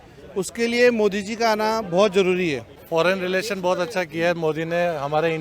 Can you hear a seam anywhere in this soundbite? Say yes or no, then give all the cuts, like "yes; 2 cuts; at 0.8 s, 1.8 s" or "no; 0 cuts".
yes; 1 cut; at 2.7 s